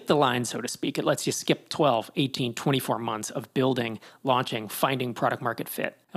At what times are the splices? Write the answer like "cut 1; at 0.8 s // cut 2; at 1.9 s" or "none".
none